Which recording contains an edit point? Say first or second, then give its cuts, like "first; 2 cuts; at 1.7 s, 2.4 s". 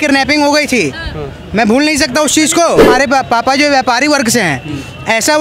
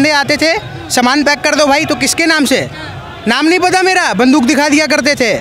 first; 1 cut; at 2.9 s